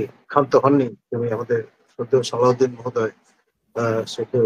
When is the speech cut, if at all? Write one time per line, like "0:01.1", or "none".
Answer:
none